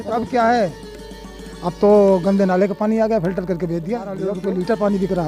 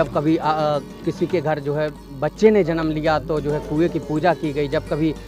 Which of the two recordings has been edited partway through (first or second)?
first